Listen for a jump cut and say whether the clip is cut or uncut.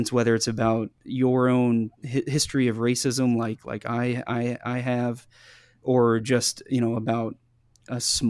cut